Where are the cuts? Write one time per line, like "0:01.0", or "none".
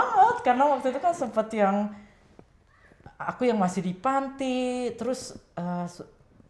none

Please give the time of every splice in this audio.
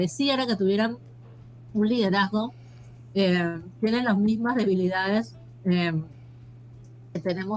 none

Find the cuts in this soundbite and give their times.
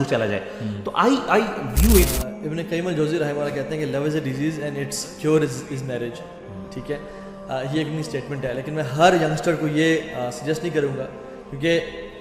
0:02.1

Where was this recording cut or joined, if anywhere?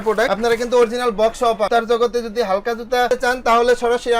0:01.7

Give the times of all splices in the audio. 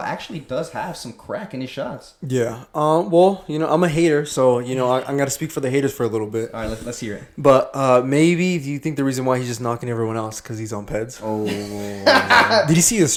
none

